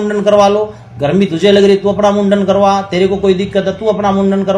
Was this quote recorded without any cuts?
yes; 0 cuts

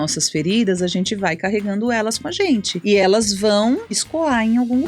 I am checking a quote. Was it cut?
yes; 2 cuts; at 3.0 s, 4.0 s

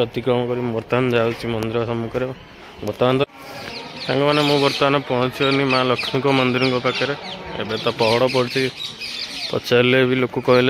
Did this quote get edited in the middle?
yes; 1 cut; at 3.2 s

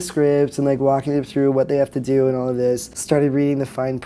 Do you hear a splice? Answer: yes; 1 cut; at 2.9 s

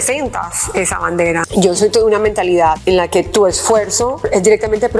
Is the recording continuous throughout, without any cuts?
no; 3 cuts; at 1.5 s, 2.8 s, 4.2 s

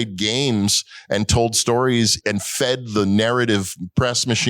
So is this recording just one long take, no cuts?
no; 1 cut; at 2.2 s

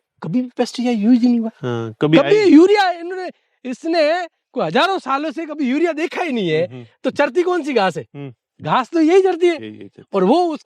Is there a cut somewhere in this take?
no; 0 cuts

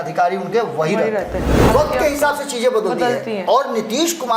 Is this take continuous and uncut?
no; 1 cut; at 1.5 s

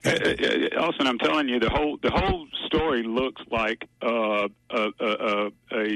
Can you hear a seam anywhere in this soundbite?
yes; 1 cut; at 3.9 s

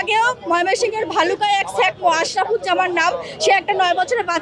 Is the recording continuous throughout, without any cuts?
yes; 0 cuts

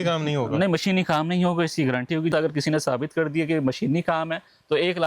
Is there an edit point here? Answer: yes; 1 cut; at 2.3 s

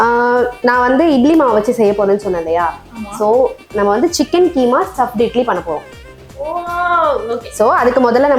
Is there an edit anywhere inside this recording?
no; 0 cuts

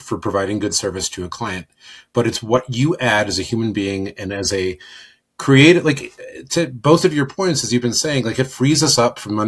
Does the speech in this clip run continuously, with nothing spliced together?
yes; 0 cuts

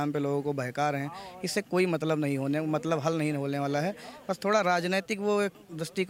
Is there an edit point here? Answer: no; 0 cuts

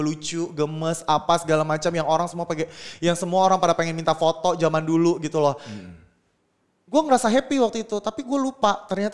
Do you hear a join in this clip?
no; 0 cuts

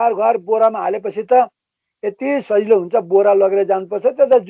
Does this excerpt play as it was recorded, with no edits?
yes; 0 cuts

